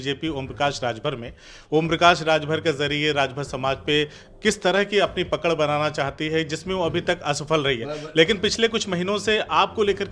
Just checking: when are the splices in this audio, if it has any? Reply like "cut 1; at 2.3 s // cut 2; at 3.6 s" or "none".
none